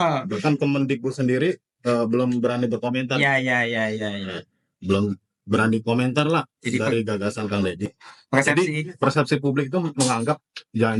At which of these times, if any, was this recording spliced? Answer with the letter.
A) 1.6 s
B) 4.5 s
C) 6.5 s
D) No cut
D